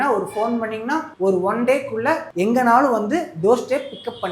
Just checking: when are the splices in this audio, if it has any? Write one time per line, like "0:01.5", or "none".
0:01.1
0:02.3